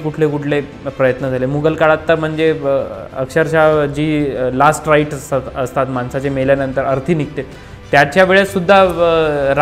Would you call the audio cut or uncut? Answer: uncut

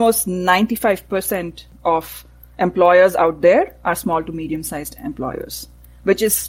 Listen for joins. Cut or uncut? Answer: cut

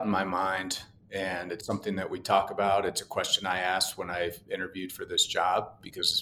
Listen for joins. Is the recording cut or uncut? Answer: uncut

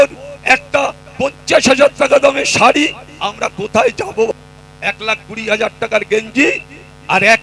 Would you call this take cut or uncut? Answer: cut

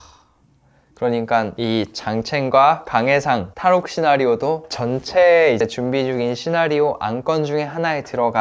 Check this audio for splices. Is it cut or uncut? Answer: uncut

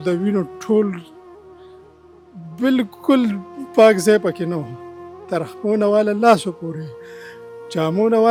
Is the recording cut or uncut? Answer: uncut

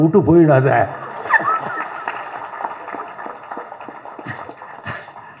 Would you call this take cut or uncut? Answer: uncut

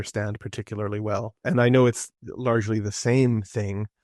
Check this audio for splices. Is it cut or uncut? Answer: cut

